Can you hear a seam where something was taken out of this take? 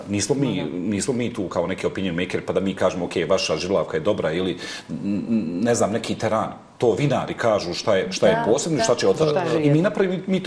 no; 0 cuts

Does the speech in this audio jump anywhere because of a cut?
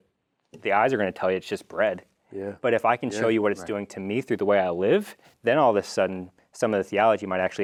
no; 0 cuts

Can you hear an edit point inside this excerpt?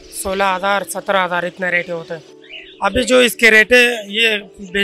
no; 0 cuts

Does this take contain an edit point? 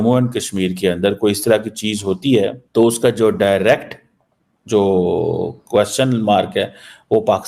no; 0 cuts

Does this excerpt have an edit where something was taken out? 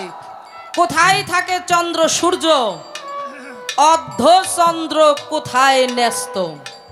no; 0 cuts

